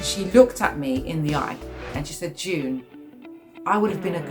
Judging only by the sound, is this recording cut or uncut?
cut